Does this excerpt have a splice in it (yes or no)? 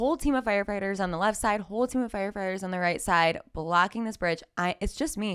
no